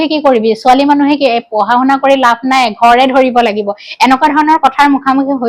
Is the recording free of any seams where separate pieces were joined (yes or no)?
yes